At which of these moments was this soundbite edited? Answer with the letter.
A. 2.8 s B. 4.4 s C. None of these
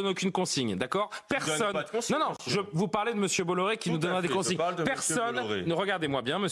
C